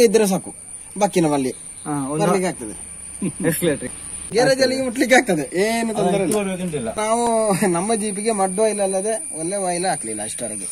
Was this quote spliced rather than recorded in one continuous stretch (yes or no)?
yes